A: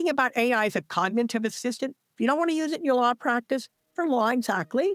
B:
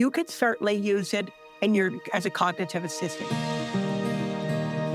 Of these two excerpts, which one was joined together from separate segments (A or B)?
B